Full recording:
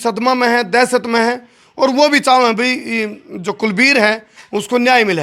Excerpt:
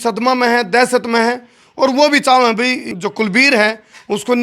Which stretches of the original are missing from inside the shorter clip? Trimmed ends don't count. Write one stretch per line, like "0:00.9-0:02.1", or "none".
0:02.9-0:03.3